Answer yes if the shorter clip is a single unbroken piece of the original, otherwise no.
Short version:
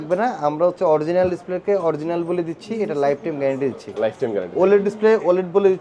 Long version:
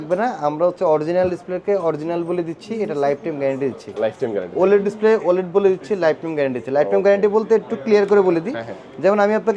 yes